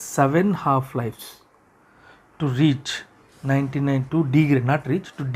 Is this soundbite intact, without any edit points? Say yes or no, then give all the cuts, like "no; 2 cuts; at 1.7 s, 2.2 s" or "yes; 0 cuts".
yes; 0 cuts